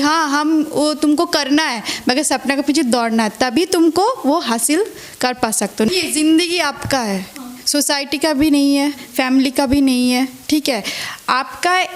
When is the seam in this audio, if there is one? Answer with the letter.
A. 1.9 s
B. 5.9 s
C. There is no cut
B